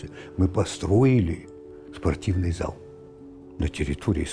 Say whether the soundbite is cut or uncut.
uncut